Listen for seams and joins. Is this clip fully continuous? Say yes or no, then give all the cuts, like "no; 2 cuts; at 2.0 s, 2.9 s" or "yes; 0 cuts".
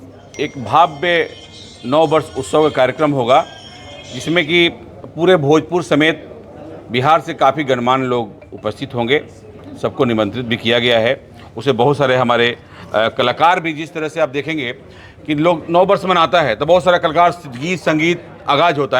yes; 0 cuts